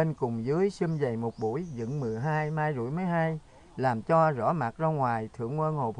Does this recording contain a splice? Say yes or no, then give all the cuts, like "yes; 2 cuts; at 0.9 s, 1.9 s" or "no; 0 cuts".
no; 0 cuts